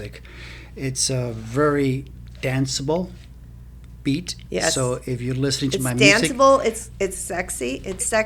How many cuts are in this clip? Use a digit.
0